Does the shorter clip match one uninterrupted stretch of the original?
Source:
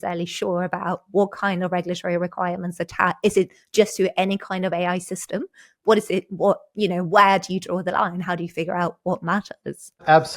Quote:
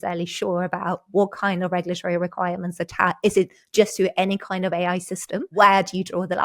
no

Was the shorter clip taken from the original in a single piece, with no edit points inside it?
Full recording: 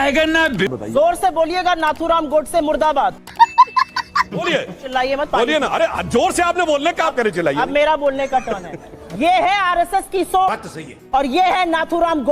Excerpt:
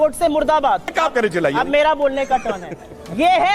no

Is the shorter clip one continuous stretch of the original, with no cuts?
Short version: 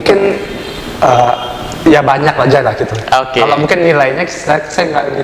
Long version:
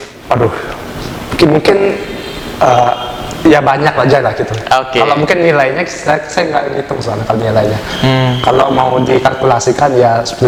yes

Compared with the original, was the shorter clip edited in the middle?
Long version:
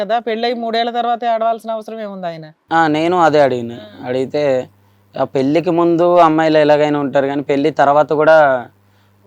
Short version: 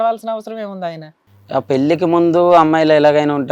yes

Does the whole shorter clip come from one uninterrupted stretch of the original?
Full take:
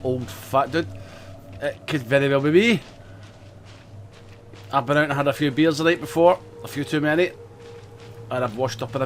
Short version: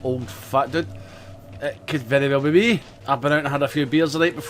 no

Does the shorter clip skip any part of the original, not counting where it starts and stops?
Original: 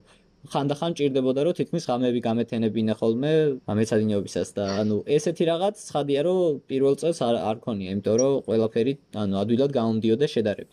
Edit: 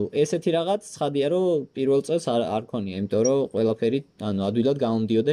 no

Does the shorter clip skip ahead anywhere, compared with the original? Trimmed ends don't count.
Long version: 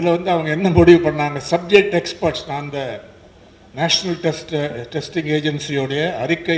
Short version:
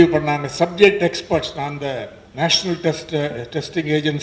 yes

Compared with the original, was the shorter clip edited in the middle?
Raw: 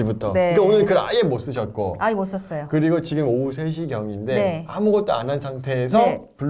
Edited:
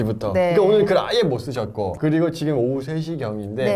yes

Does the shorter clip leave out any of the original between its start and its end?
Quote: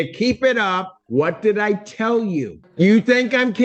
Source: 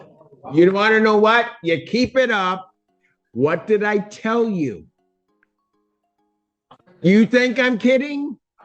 yes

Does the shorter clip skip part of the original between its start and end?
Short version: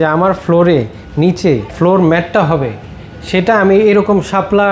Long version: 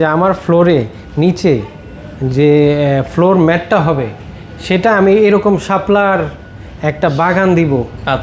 yes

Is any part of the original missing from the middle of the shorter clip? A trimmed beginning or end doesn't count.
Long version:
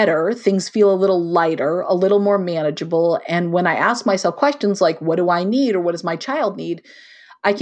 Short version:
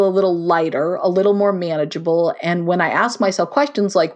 no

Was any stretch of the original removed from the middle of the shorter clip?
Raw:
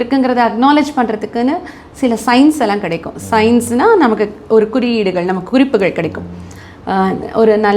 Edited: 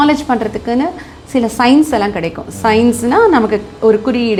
no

